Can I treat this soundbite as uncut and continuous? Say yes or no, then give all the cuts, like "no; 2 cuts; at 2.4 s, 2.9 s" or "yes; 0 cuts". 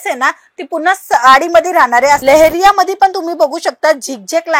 no; 1 cut; at 2.2 s